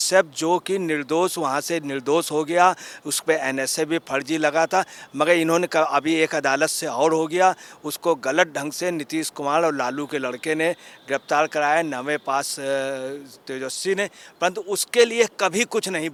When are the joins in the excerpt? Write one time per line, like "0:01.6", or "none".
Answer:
none